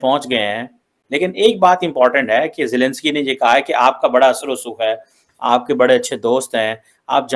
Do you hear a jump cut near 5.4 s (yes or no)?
no